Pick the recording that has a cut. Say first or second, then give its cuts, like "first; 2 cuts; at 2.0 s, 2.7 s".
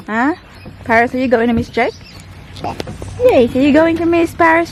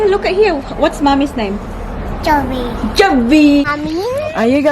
second; 1 cut; at 3.7 s